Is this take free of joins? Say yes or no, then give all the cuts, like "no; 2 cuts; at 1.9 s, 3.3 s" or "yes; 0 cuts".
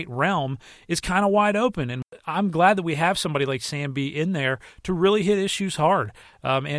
no; 1 cut; at 2.1 s